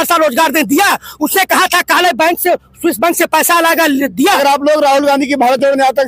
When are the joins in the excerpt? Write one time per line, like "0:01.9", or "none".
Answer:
0:04.4